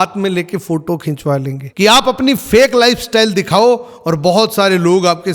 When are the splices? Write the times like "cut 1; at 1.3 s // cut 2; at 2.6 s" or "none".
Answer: cut 1; at 1.6 s